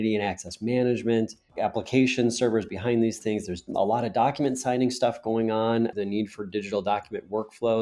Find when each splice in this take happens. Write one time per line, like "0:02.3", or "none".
0:01.5
0:05.9